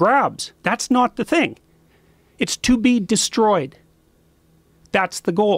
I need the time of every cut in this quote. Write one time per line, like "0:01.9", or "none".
none